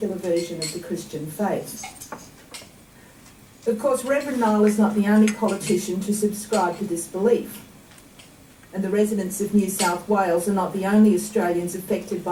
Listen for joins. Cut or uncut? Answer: uncut